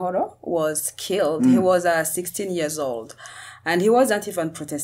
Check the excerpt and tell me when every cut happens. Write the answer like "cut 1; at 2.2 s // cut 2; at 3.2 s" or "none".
none